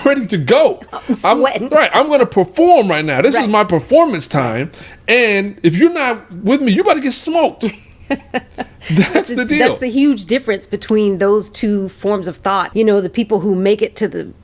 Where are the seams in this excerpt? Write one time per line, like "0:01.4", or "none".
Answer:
0:12.7